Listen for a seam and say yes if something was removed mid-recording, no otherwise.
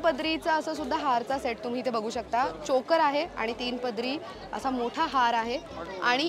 no